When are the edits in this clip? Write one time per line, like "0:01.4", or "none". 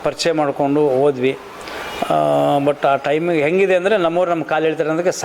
none